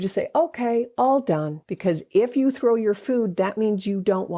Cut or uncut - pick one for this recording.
cut